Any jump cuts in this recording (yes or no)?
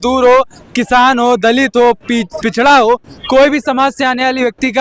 no